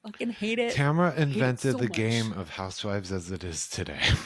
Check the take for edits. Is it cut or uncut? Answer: uncut